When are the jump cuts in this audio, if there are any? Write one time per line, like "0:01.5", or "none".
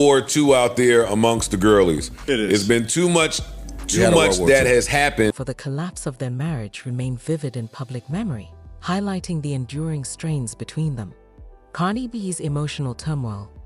0:05.3